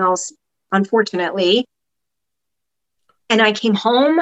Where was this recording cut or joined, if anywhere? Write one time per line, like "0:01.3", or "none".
none

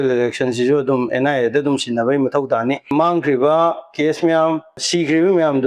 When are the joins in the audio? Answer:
0:02.9
0:04.9

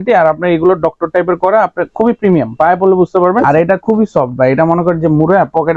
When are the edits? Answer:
0:03.4

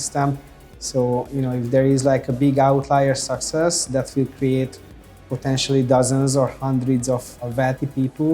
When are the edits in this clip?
0:07.4

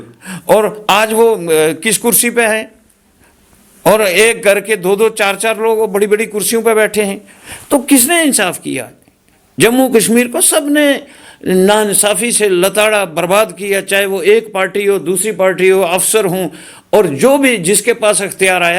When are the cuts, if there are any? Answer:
none

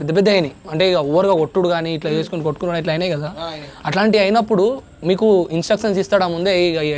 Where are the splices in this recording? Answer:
none

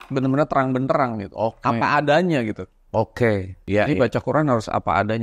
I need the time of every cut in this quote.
0:03.6

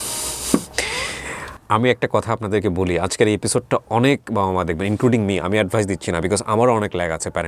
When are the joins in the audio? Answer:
0:01.5

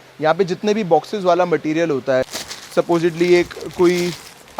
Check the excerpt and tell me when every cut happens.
0:02.3

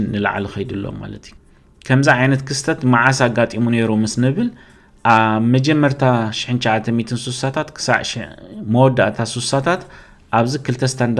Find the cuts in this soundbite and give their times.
0:01.4

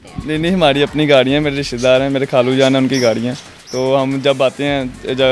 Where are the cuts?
none

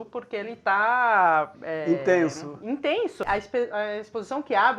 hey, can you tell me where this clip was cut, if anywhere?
0:03.2

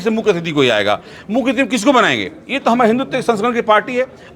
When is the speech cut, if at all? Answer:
none

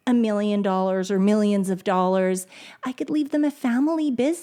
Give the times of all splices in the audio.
none

